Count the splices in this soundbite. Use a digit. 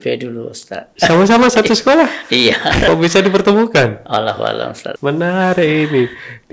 3